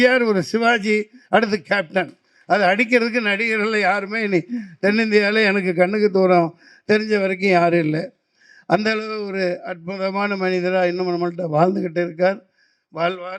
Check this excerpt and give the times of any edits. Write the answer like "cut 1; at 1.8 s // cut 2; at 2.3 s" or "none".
none